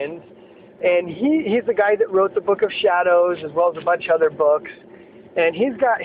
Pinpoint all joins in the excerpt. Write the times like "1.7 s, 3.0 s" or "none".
1.3 s